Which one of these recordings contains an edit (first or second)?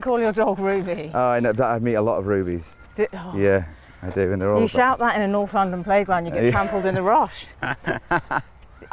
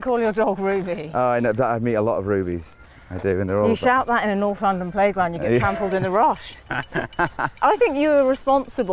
second